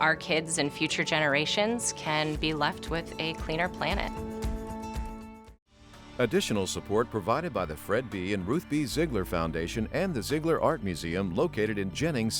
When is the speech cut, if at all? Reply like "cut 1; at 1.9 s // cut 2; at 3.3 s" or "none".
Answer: cut 1; at 6.0 s